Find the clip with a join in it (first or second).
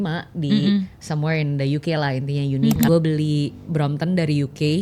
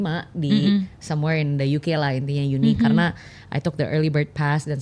first